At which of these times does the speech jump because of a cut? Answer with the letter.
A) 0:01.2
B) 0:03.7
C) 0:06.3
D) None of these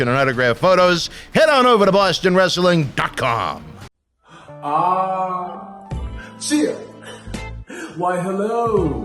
D